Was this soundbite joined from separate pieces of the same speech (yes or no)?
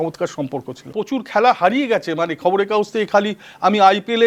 yes